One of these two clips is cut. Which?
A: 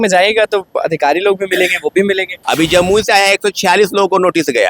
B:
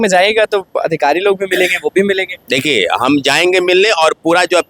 A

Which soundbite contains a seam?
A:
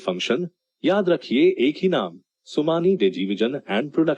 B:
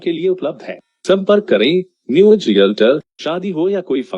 B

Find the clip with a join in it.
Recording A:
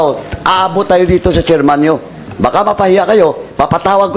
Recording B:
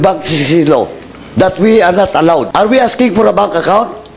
B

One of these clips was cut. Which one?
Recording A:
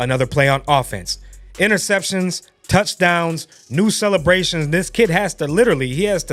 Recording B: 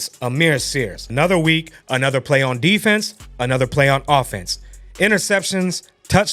B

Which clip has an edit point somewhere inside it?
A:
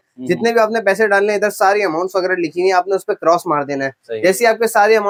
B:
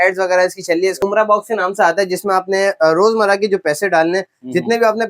B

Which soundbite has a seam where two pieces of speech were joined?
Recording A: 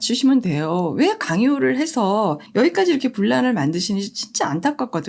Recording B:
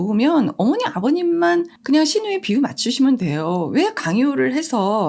B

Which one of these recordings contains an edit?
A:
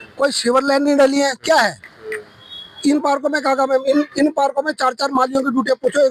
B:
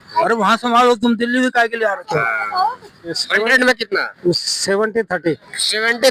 B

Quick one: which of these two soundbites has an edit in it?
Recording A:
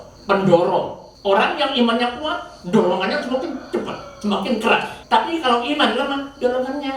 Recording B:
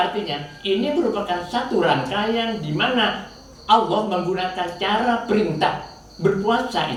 A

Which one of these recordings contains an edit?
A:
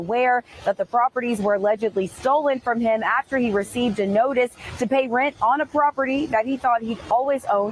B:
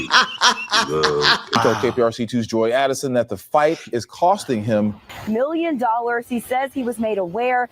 B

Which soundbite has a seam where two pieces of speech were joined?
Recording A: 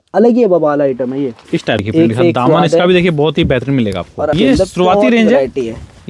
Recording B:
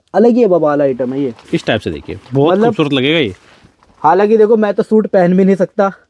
A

